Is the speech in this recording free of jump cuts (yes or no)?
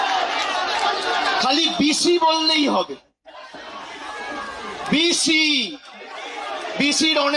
yes